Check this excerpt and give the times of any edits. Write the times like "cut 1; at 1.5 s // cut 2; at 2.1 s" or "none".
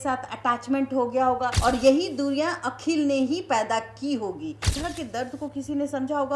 cut 1; at 1.6 s // cut 2; at 4.6 s